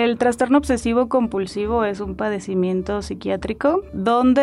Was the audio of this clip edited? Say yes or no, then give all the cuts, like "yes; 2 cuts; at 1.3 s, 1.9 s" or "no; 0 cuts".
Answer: no; 0 cuts